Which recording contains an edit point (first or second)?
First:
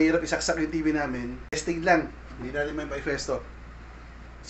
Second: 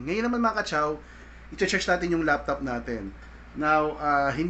first